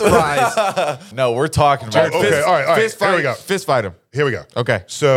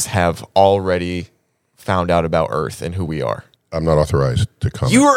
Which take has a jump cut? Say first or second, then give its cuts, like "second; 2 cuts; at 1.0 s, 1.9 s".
first; 1 cut; at 1.1 s